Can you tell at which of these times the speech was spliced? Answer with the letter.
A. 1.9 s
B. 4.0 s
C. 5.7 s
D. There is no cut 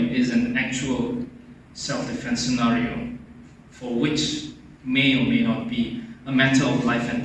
D